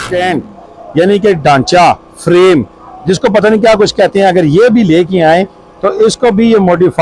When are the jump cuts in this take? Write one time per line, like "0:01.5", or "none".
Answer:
none